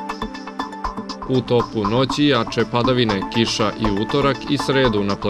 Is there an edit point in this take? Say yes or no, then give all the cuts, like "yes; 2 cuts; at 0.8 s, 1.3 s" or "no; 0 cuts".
no; 0 cuts